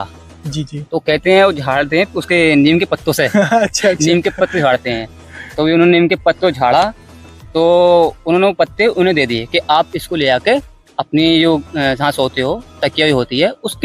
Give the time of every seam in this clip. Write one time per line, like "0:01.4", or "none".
none